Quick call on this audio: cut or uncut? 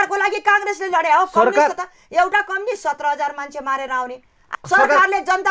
cut